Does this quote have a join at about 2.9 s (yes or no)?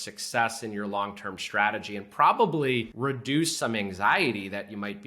yes